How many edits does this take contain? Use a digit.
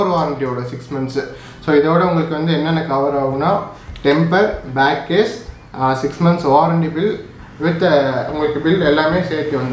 0